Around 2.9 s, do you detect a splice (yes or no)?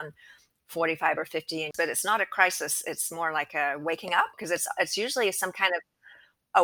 no